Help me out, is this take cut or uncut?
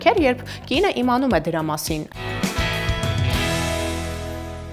cut